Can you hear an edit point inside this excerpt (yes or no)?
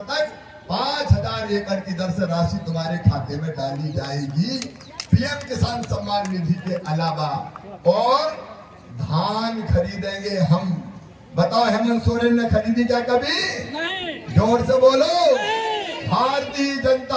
no